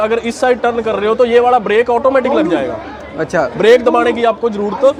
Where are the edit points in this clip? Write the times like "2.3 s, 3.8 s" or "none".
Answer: none

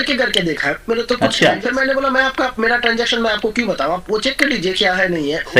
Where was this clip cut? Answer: 1.6 s

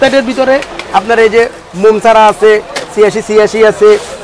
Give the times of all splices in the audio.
none

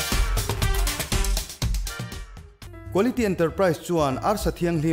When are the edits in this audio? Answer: 2.5 s

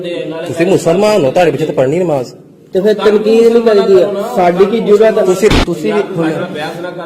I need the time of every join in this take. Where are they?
5.5 s

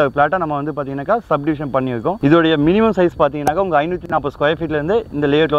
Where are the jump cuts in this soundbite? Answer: 2.2 s

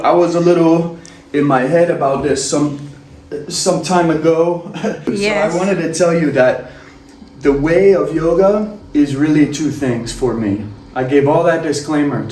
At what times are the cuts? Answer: 5.0 s

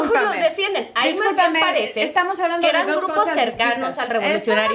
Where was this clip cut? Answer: 2.5 s

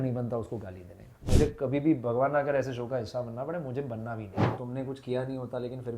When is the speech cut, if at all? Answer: 1.3 s, 4.6 s

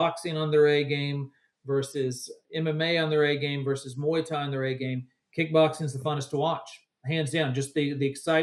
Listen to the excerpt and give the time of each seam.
none

